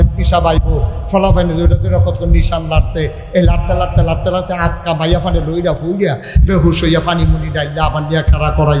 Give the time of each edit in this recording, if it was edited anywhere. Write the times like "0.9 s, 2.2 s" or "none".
none